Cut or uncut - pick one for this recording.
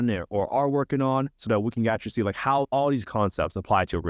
cut